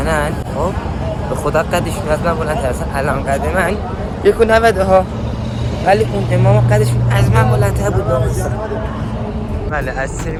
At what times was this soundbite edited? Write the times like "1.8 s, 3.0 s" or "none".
none

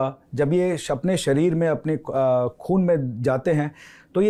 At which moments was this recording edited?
none

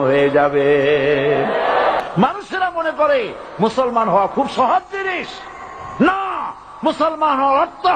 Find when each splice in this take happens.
2.0 s

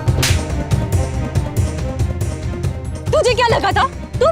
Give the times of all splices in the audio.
3.1 s

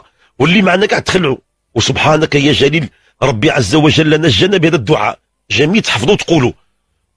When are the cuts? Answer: none

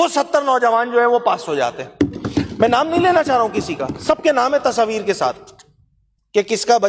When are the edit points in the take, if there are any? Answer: none

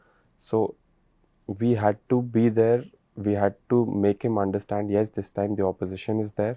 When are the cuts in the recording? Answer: none

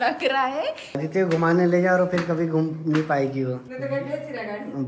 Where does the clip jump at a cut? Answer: 1.0 s, 3.7 s

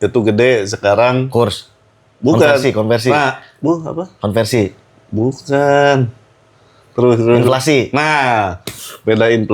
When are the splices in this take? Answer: none

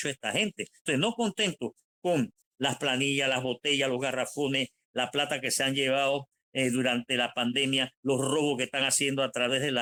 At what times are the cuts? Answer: none

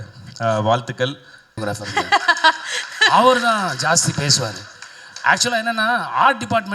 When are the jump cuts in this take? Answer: 1.6 s

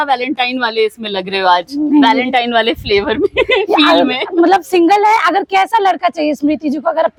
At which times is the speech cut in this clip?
none

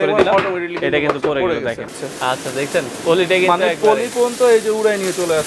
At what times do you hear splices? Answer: 1.9 s

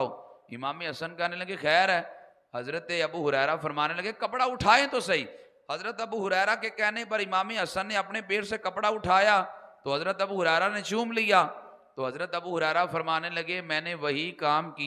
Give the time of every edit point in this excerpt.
none

